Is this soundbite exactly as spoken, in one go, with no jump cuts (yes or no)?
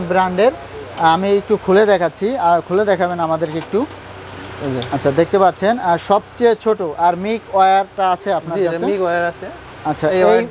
yes